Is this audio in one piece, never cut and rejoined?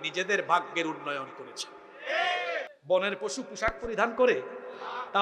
no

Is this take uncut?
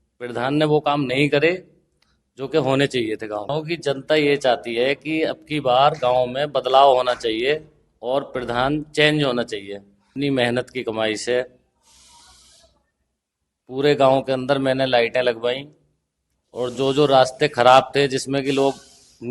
no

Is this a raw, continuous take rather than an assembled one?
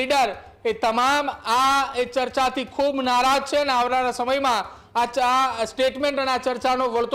yes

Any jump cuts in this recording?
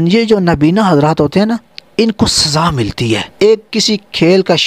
yes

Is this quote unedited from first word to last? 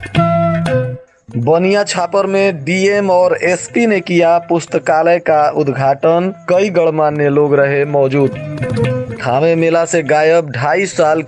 no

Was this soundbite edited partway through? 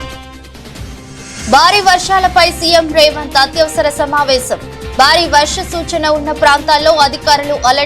yes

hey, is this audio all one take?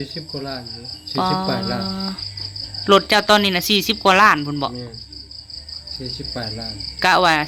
yes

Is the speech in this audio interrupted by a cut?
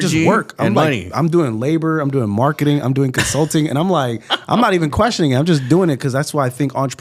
no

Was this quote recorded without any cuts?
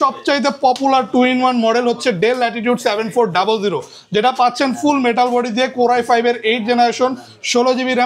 yes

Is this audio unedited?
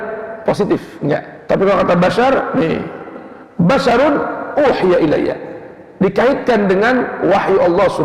no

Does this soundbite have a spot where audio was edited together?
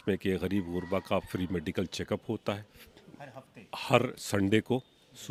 no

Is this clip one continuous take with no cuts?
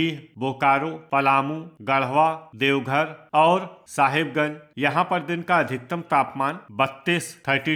yes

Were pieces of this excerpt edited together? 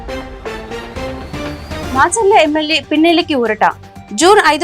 yes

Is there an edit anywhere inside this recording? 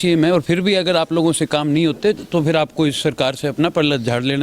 no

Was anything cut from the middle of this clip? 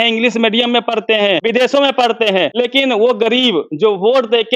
yes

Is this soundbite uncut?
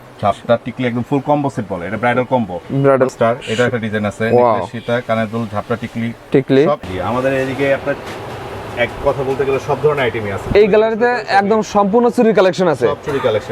no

